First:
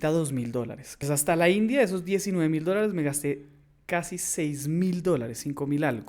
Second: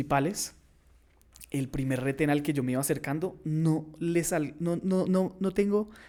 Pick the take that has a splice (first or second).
first